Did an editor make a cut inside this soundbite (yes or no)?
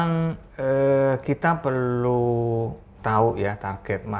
yes